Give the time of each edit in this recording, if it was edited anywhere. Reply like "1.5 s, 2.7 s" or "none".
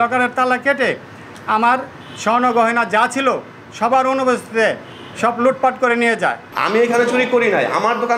6.4 s